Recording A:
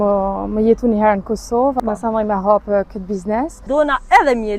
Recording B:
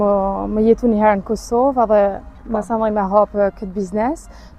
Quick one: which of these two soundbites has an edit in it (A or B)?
A